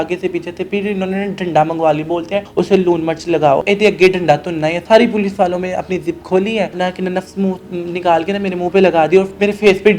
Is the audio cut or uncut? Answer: cut